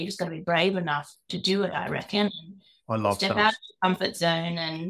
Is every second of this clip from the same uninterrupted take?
yes; 0 cuts

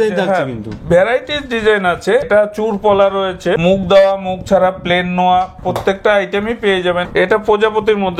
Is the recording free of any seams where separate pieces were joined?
no; 3 cuts; at 2.3 s, 3.6 s, 7.0 s

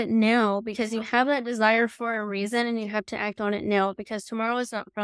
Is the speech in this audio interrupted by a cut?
no; 0 cuts

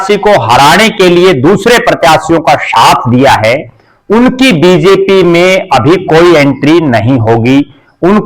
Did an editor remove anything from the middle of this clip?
no; 0 cuts

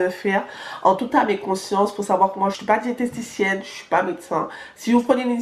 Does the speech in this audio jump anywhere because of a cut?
yes; 1 cut; at 2.6 s

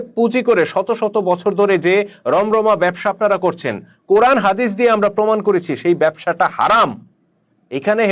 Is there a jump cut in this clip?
no; 0 cuts

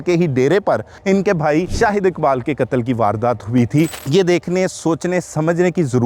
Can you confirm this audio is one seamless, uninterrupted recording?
no; 3 cuts; at 0.9 s, 1.7 s, 4.0 s

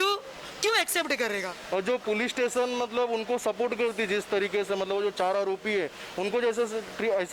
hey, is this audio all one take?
no; 1 cut; at 1.6 s

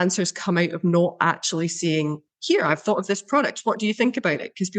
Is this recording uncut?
yes; 0 cuts

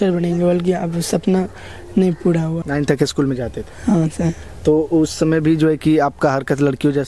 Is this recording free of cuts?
no; 1 cut; at 2.6 s

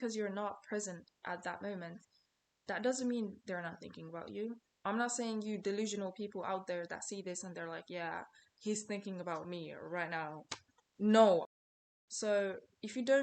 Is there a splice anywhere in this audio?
yes; 1 cut; at 11.4 s

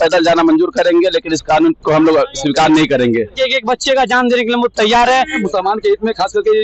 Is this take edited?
yes; 2 cuts; at 3.3 s, 5.4 s

